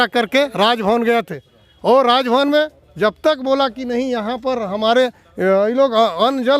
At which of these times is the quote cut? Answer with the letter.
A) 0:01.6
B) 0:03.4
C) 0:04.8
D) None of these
D